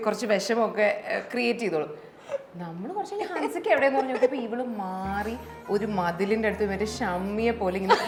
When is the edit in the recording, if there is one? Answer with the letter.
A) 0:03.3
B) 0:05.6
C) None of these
C